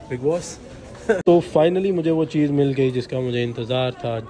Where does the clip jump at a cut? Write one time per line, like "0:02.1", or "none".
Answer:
0:01.2